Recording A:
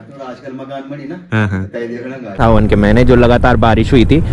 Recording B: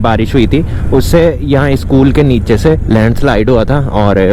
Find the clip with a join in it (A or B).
A